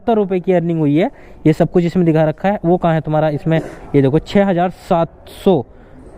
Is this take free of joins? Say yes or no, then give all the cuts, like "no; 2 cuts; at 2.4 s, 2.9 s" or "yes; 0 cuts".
no; 1 cut; at 3.8 s